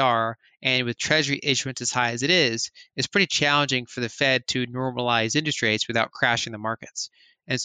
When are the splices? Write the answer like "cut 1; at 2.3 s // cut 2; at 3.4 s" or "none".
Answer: none